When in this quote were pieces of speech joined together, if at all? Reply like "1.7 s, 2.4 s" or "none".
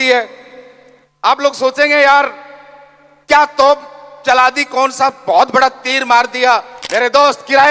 6.8 s